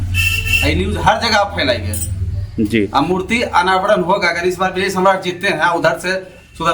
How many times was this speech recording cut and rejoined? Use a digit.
0